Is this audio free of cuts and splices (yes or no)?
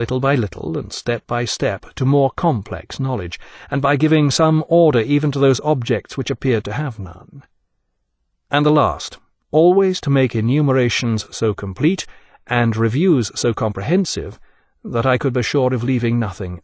no